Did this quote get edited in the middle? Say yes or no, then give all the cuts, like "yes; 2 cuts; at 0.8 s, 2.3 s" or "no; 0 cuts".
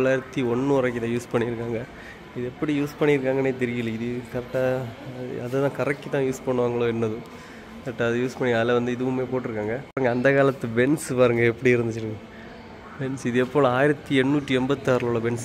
no; 0 cuts